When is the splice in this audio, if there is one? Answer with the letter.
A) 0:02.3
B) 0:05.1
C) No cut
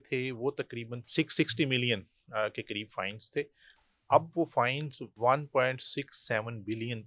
B